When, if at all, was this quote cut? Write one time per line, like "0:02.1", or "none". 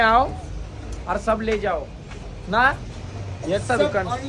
none